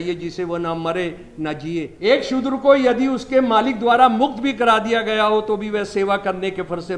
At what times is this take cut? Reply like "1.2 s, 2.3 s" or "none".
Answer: 1.9 s